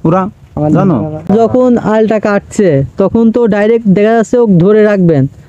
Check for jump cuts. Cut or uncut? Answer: cut